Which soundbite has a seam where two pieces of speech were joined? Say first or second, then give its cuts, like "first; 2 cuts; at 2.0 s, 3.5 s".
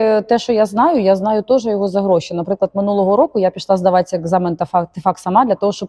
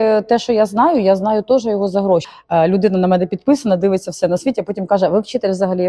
second; 1 cut; at 2.3 s